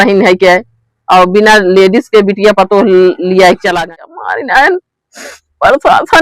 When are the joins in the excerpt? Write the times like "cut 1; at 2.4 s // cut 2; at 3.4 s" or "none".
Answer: cut 1; at 3.8 s